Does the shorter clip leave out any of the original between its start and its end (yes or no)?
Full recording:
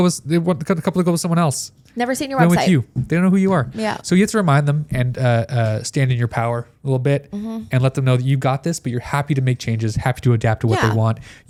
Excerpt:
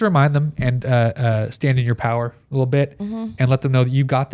no